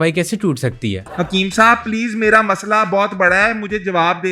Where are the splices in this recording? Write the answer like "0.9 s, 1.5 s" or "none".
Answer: 1.0 s